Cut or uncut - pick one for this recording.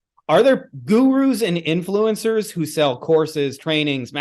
uncut